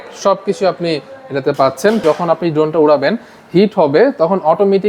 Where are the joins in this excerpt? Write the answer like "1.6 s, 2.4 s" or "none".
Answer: 2.0 s